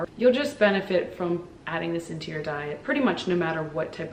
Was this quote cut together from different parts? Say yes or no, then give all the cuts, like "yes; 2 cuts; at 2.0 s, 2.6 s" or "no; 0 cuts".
no; 0 cuts